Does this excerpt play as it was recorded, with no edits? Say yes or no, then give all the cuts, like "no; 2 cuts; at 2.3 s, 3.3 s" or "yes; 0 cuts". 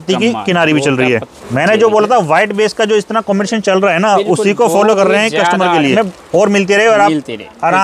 no; 2 cuts; at 1.4 s, 5.9 s